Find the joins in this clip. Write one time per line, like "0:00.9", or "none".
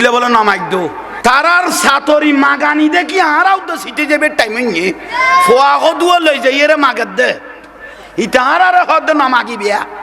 0:01.0